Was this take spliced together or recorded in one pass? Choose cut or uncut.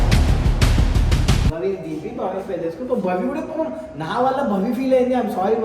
cut